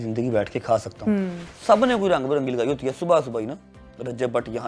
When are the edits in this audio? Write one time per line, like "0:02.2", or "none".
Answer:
0:01.5